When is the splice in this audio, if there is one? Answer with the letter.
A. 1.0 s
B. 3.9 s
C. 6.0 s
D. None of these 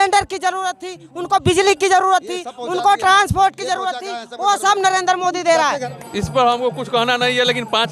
C